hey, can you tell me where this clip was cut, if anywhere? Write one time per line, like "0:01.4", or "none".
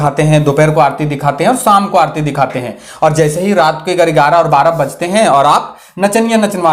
none